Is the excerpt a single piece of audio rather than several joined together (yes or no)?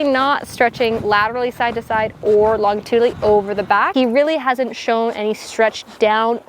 no